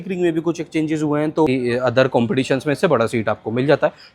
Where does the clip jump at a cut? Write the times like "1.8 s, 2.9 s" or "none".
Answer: 1.5 s